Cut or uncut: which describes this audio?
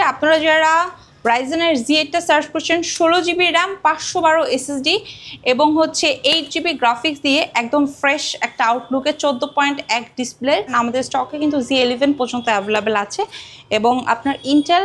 cut